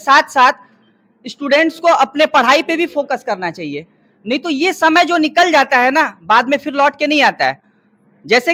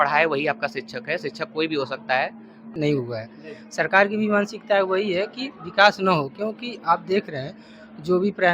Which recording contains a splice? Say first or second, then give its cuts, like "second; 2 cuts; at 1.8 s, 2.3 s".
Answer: second; 1 cut; at 2.6 s